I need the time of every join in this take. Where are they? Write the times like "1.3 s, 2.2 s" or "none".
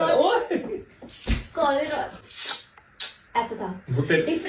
2.2 s